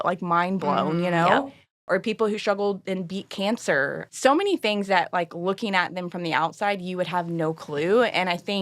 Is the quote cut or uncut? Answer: cut